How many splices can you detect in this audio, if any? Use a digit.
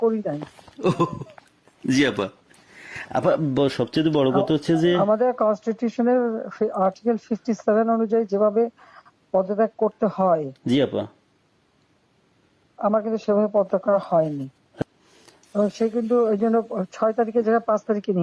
1